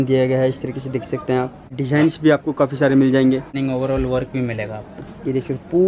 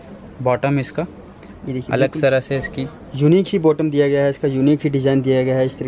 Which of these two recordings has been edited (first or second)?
first